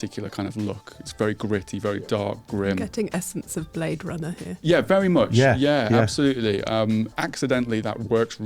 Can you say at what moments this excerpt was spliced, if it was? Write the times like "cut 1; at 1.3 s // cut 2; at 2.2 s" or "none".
cut 1; at 7.1 s